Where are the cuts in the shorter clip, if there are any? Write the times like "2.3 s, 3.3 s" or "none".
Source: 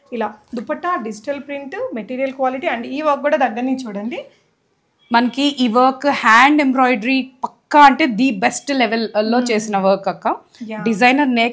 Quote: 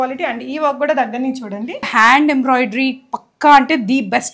1.9 s